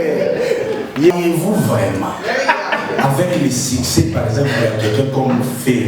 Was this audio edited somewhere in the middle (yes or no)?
yes